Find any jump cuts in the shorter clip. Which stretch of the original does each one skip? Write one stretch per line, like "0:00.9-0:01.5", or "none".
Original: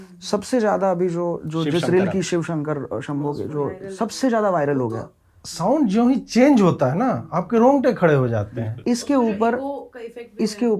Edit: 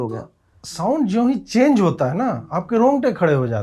none